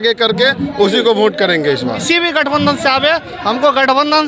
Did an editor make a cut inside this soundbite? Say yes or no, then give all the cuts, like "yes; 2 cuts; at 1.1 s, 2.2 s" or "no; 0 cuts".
yes; 1 cut; at 2.0 s